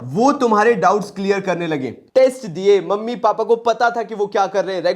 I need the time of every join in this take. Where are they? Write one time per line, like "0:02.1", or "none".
0:02.0